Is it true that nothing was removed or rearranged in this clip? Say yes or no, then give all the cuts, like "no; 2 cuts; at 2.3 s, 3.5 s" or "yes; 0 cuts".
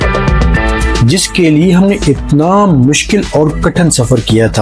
yes; 0 cuts